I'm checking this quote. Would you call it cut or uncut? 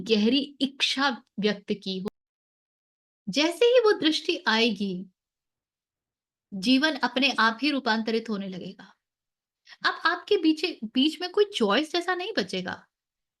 cut